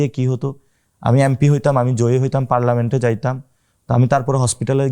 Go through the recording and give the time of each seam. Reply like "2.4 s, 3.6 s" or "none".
none